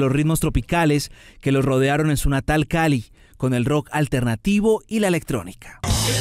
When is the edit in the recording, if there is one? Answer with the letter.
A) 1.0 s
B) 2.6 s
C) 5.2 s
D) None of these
C